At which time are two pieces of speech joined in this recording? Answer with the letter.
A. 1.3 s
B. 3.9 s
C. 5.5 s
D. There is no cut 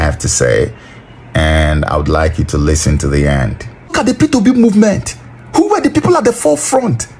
B